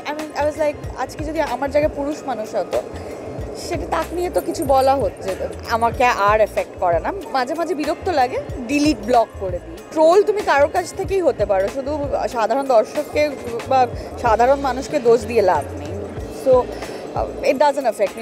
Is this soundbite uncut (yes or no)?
yes